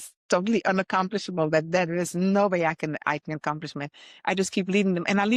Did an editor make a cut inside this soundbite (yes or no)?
no